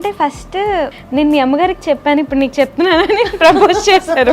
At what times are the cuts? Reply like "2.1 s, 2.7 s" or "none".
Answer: 0.9 s